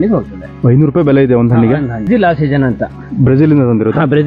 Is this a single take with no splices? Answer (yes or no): no